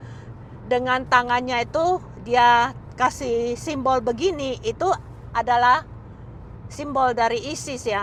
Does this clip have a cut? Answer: no; 0 cuts

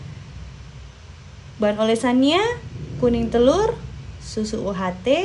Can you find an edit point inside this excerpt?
no; 0 cuts

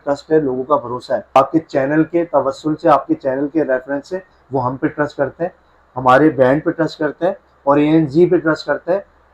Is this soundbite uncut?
no; 1 cut; at 1.4 s

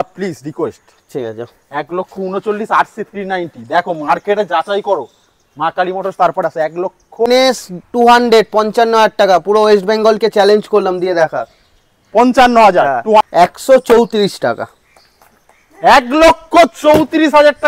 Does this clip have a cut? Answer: yes; 2 cuts; at 7.3 s, 13.2 s

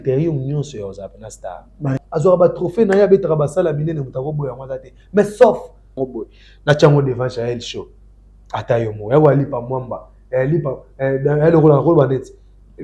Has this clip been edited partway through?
yes; 2 cuts; at 1.8 s, 6.0 s

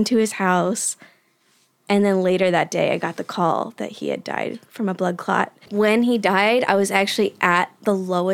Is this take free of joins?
no; 1 cut; at 5.7 s

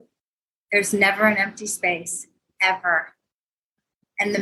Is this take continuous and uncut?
yes; 0 cuts

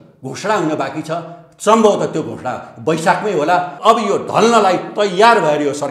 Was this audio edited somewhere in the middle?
yes; 1 cut; at 3.7 s

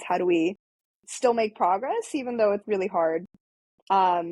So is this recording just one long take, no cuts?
no; 1 cut; at 2.6 s

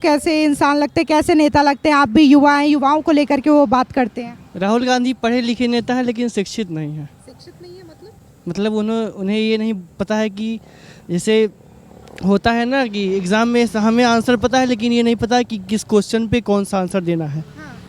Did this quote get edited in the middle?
no; 0 cuts

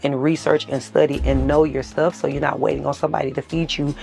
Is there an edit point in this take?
no; 0 cuts

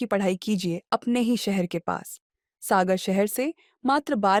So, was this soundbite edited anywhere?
no; 0 cuts

